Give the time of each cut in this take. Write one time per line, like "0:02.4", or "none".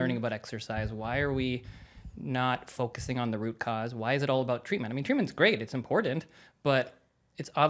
none